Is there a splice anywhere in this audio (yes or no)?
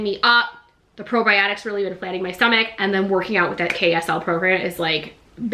no